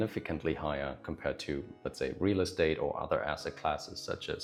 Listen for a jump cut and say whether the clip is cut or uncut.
uncut